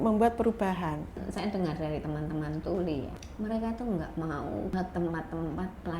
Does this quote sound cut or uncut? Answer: cut